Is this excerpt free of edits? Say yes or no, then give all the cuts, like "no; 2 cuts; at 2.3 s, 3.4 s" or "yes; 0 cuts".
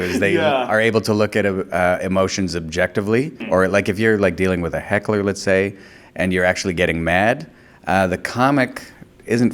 no; 1 cut; at 3.4 s